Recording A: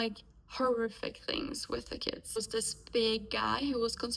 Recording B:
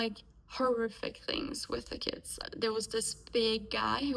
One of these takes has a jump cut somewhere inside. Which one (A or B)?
A